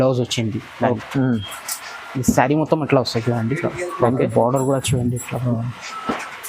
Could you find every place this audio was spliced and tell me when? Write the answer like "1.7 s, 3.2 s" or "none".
1.0 s

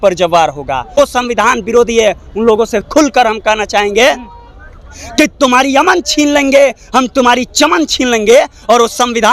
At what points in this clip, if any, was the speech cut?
1.0 s

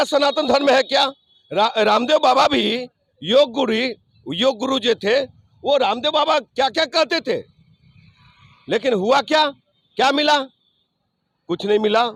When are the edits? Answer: none

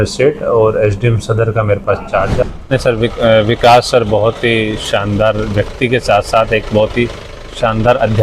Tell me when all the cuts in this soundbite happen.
2.4 s

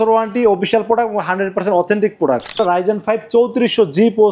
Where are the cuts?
2.6 s

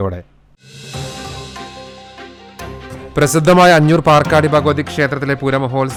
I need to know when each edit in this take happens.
none

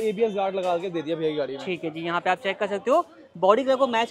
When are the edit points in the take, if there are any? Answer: none

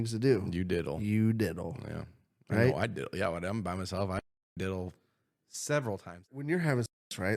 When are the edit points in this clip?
6.2 s

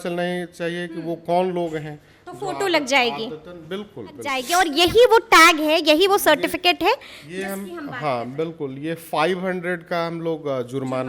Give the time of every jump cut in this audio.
4.4 s

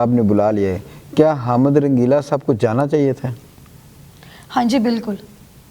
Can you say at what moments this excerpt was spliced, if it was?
none

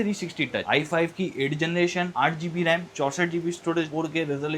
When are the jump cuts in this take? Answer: none

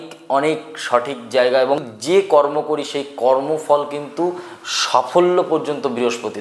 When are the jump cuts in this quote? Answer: 1.9 s

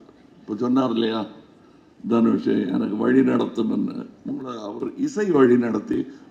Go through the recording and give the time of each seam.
none

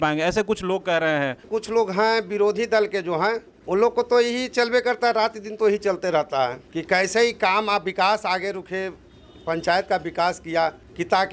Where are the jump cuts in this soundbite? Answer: none

